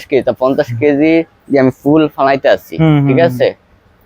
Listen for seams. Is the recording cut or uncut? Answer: cut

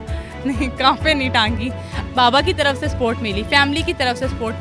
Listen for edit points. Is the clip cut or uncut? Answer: cut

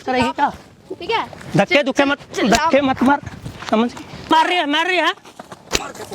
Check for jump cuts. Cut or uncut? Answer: cut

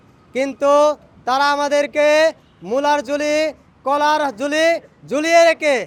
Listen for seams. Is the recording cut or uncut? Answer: uncut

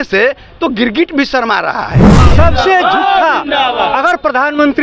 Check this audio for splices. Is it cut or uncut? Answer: cut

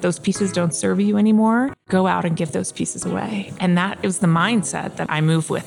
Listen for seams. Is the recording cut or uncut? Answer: cut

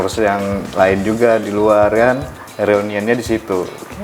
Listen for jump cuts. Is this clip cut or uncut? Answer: uncut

